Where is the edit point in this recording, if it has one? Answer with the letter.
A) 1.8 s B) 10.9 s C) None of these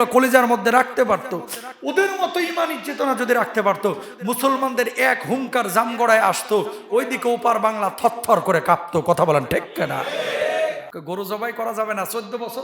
B